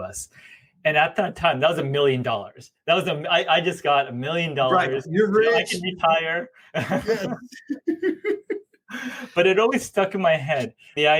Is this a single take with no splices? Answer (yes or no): yes